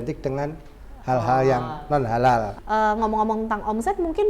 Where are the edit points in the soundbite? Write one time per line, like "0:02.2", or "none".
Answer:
0:02.6